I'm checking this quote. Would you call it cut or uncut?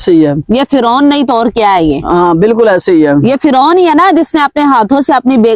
uncut